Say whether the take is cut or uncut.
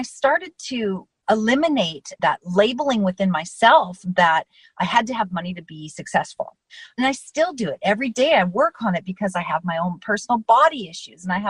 uncut